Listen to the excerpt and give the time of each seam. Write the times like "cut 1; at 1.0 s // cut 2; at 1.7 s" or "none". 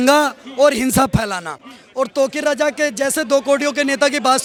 none